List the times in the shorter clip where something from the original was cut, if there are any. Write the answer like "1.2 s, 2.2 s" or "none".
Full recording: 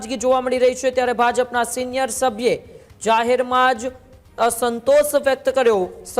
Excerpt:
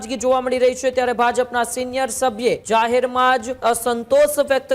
2.6 s, 3.5 s